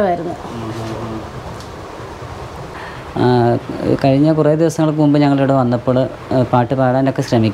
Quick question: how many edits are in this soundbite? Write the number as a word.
one